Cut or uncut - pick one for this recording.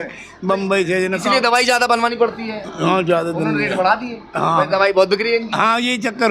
uncut